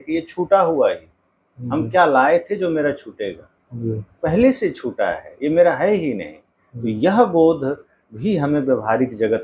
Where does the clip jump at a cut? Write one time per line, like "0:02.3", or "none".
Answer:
none